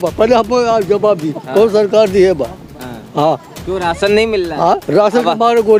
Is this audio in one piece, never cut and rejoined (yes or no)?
yes